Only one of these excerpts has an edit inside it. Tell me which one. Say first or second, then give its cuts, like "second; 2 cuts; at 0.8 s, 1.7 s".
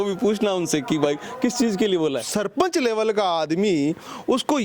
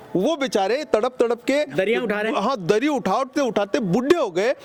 first; 1 cut; at 2.2 s